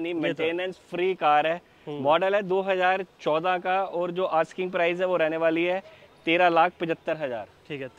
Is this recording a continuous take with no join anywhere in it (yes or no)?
yes